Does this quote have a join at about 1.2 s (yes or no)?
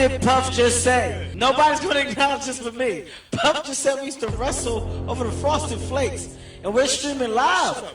yes